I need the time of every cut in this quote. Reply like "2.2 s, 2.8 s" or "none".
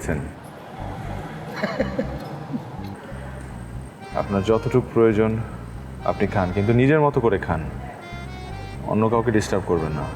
2.9 s